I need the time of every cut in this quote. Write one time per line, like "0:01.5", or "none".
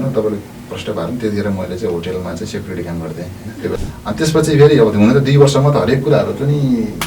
0:03.7